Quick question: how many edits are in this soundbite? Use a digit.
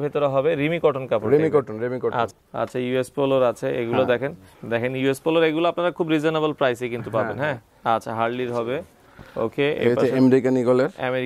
3